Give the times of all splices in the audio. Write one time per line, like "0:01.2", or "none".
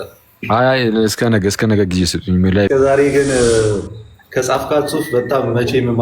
0:02.7